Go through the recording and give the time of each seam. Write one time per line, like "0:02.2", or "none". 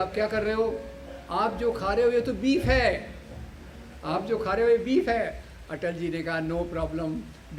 none